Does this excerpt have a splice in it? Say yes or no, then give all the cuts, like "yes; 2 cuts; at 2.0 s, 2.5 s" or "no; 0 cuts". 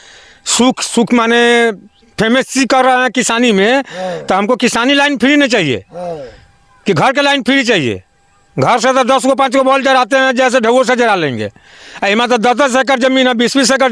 no; 0 cuts